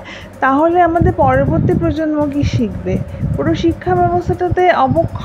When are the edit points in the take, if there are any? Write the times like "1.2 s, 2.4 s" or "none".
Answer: none